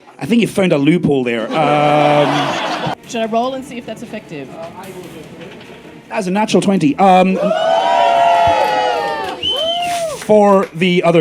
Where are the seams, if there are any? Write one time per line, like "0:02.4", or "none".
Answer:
0:02.7
0:06.1